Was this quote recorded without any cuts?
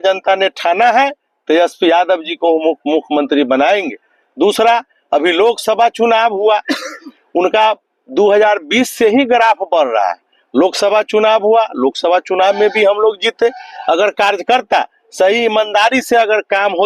yes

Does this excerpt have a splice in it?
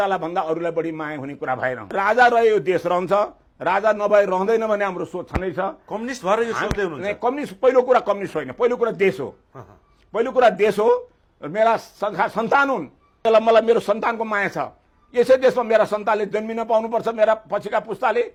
no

